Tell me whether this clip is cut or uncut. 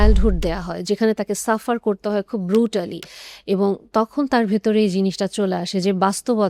uncut